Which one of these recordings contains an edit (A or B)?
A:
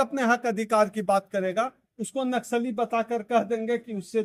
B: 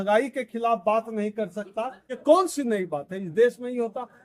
B